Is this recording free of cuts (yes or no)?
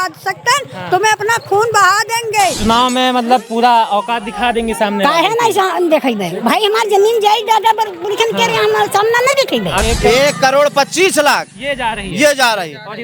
no